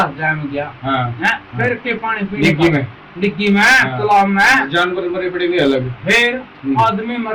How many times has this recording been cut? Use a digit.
0